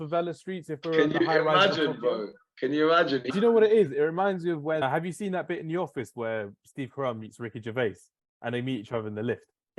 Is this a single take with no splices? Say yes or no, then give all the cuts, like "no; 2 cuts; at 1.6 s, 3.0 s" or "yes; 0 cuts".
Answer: no; 2 cuts; at 3.2 s, 4.8 s